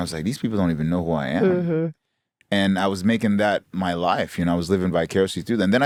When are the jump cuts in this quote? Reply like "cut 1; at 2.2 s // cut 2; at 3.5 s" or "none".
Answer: none